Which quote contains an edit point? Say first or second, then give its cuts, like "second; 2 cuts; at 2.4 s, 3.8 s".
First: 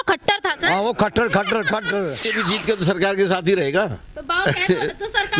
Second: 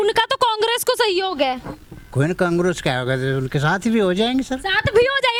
first; 1 cut; at 2.2 s